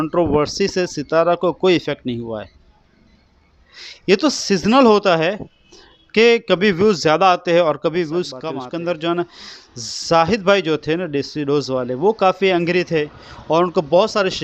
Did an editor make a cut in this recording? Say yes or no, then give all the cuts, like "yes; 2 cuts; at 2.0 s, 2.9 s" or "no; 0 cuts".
yes; 1 cut; at 8.4 s